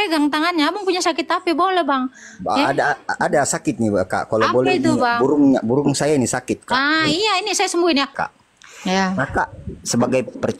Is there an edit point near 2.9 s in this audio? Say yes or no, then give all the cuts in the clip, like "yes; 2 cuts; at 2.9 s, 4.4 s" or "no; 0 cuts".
no; 1 cut; at 8.2 s